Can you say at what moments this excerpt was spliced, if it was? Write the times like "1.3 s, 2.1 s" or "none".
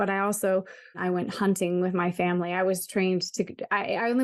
1.0 s